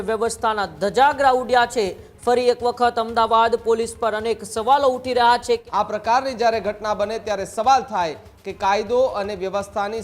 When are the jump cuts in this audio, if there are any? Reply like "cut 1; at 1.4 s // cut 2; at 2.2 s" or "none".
cut 1; at 5.6 s

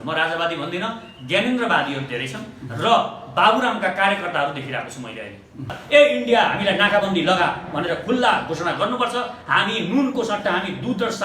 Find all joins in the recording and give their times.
cut 1; at 5.7 s

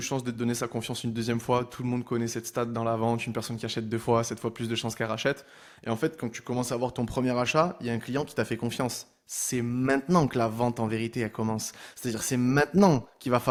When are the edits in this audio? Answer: none

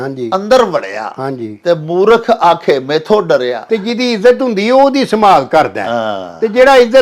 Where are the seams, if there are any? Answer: cut 1; at 3.6 s

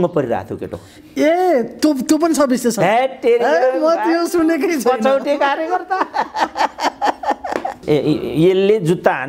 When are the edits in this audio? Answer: cut 1; at 7.8 s

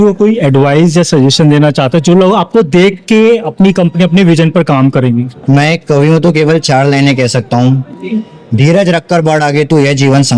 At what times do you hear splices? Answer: none

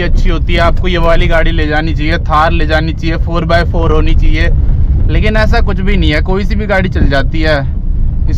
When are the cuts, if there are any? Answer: none

